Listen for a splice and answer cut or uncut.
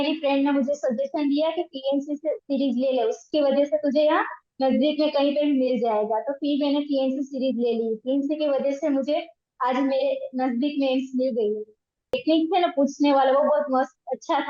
cut